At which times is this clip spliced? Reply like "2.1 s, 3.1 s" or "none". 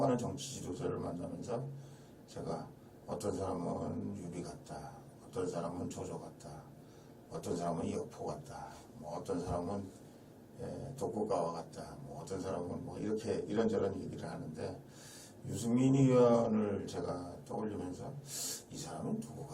none